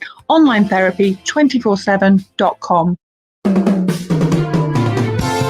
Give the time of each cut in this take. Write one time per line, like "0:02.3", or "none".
0:03.2